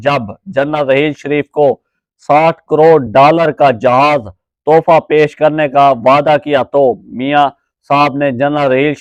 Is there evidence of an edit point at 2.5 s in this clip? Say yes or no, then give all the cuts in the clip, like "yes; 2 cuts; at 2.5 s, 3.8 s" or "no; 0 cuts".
no; 0 cuts